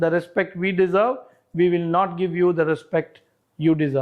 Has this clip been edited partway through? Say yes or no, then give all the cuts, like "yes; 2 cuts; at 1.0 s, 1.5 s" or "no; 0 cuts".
no; 0 cuts